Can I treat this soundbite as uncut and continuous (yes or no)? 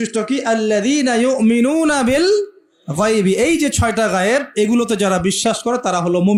yes